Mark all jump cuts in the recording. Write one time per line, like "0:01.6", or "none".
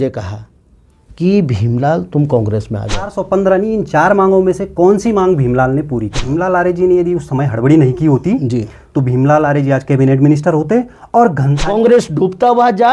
0:03.2
0:06.2
0:11.6